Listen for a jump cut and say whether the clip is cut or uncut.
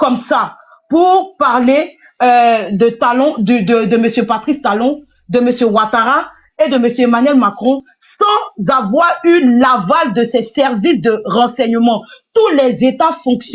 uncut